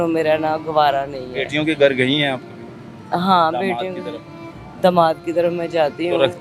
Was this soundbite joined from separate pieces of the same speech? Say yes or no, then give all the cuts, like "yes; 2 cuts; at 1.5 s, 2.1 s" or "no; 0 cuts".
no; 0 cuts